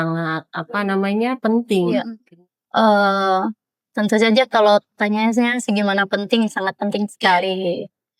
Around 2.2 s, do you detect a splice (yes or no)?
yes